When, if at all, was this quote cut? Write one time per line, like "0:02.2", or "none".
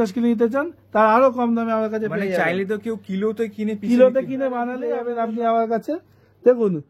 0:04.8